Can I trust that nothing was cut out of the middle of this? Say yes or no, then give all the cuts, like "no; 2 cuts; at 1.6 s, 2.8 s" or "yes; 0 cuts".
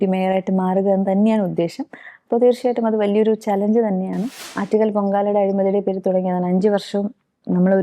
no; 1 cut; at 4.5 s